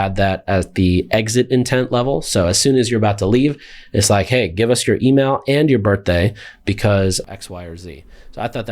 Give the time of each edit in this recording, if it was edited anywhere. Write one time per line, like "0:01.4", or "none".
0:07.2